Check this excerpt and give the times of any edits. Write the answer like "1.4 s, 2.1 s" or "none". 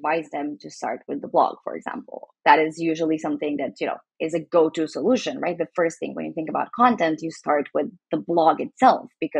none